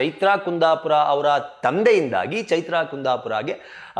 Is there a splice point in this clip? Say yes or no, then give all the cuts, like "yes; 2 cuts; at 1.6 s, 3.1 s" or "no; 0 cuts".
no; 0 cuts